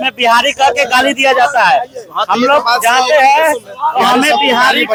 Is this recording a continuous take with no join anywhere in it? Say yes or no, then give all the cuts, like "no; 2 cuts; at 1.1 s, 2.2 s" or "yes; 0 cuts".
yes; 0 cuts